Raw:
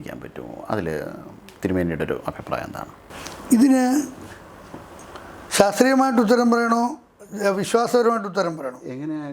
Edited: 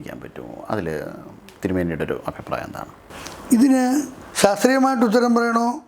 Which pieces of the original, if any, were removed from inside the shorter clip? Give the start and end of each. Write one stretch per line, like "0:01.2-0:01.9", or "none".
0:04.2-0:05.4